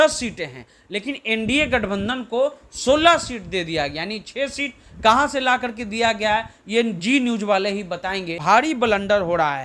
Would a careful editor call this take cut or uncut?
cut